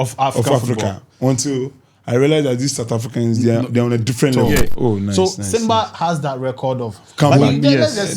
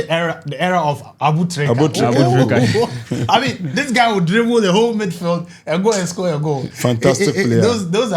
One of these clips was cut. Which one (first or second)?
first